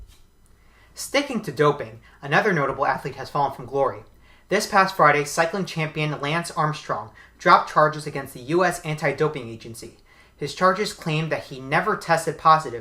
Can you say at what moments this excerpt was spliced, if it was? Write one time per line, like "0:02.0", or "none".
0:11.0